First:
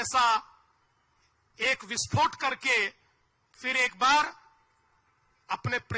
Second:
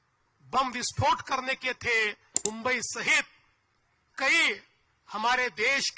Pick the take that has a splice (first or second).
second